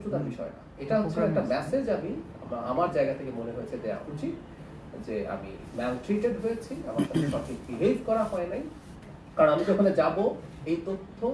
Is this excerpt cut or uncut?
uncut